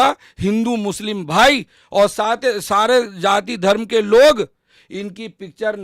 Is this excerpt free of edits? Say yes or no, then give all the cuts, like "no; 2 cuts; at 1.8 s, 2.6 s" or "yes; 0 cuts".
yes; 0 cuts